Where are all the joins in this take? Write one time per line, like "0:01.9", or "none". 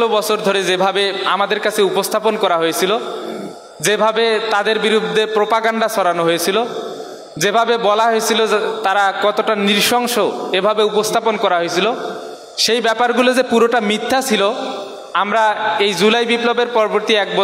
none